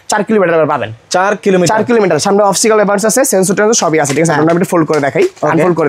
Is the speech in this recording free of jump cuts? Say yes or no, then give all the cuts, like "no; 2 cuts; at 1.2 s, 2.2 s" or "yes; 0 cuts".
yes; 0 cuts